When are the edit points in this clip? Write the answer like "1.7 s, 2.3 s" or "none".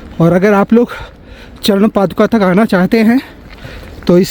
none